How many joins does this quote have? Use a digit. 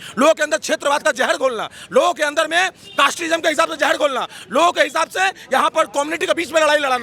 0